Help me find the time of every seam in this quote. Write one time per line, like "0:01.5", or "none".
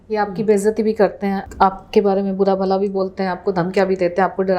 0:01.4